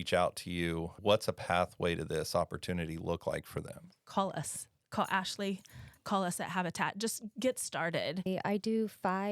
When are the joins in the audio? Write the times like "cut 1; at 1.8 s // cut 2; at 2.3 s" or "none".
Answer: cut 1; at 0.9 s // cut 2; at 4.0 s // cut 3; at 8.3 s

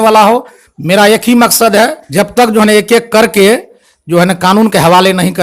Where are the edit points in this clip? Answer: cut 1; at 2.0 s

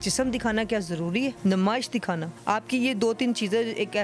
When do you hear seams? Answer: cut 1; at 1.4 s // cut 2; at 2.3 s

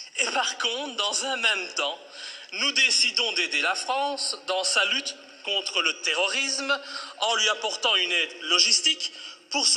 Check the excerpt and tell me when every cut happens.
cut 1; at 5.3 s

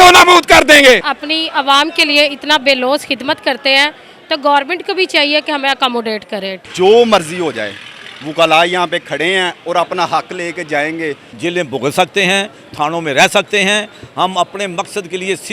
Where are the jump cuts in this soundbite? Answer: cut 1; at 1.0 s // cut 2; at 6.6 s // cut 3; at 11.3 s

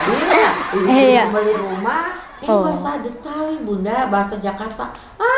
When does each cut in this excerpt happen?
cut 1; at 2.2 s

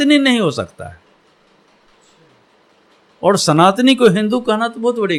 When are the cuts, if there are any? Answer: none

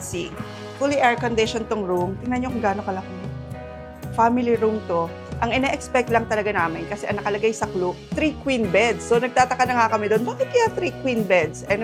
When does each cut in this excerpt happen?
none

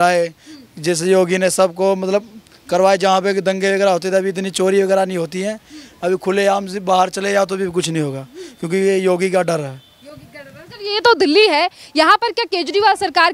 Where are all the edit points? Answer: none

